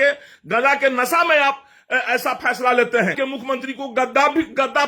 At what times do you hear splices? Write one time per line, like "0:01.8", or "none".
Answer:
0:03.2